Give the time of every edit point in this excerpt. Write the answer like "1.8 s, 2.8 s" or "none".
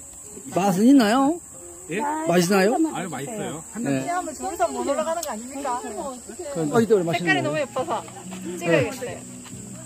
4.0 s, 6.8 s